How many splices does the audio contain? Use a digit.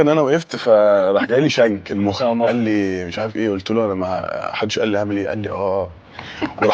0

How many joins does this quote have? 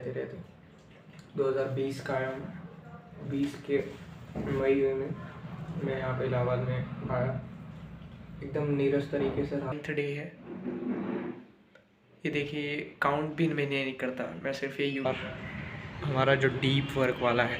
2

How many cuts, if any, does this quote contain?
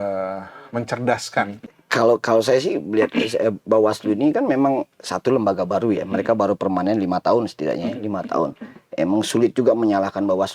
1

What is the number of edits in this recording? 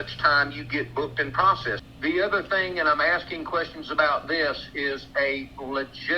1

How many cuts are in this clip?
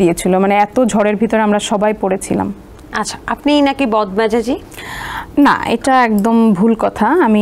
0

